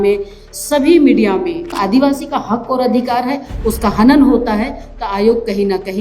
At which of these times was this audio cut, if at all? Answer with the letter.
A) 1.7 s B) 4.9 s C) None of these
A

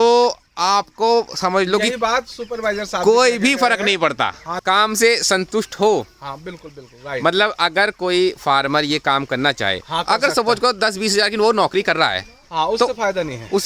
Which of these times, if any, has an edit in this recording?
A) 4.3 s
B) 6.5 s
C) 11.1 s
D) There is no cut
A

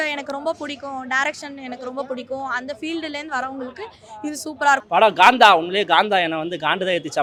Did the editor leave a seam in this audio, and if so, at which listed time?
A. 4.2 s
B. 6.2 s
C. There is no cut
C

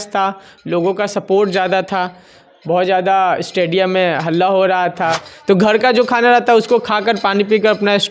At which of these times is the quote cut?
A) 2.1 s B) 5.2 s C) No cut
B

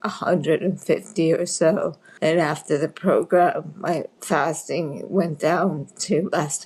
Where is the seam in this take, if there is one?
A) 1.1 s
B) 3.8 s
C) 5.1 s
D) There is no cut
D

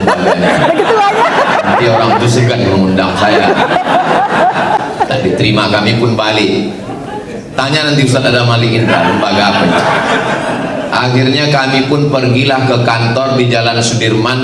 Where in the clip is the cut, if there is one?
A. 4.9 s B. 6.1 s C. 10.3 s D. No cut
D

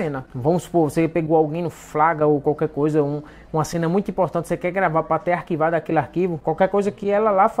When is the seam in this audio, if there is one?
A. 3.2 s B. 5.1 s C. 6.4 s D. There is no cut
C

